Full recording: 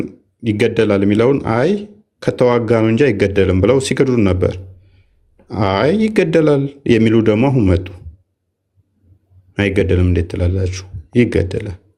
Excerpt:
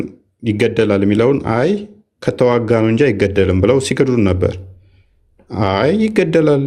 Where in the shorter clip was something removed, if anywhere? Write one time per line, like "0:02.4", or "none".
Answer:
none